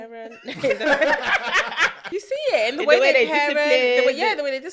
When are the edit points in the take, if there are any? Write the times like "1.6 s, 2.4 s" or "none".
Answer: 2.0 s